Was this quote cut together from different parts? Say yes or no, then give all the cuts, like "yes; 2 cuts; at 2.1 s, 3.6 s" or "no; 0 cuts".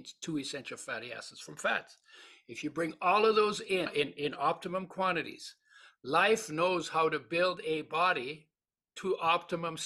yes; 1 cut; at 3.9 s